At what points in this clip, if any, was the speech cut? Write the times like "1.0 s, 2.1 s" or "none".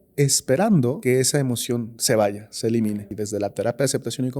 1.0 s, 3.2 s

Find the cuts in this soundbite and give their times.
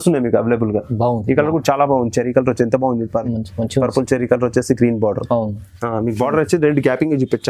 none

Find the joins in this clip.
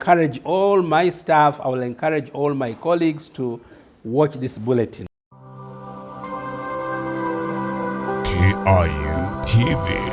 5.0 s

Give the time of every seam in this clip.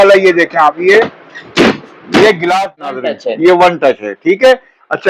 3.1 s

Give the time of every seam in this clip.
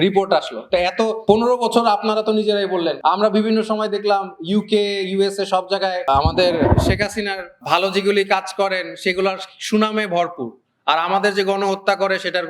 1.2 s, 3.0 s, 6.0 s, 7.5 s

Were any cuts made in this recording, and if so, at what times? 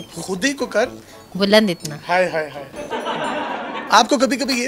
2.6 s, 3.8 s

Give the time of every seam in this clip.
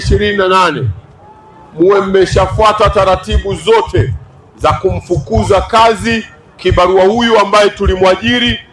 none

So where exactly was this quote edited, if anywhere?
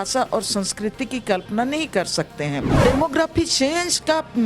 2.8 s

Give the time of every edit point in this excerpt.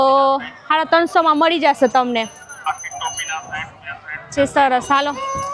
none

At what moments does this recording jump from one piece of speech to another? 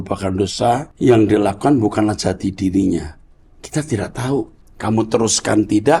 0.9 s, 4.6 s

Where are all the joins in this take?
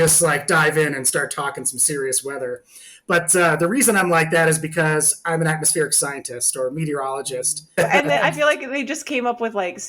7.8 s

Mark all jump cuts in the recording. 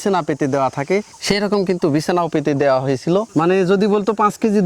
3.3 s

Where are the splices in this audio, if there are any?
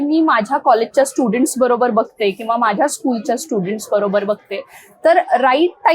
none

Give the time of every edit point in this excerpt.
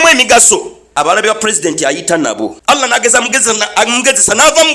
0.8 s, 2.9 s

